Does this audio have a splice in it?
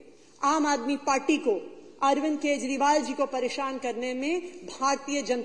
no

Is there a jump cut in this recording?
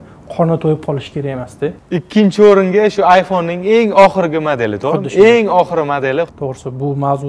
yes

